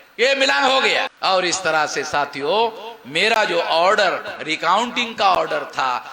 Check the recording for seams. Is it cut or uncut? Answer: cut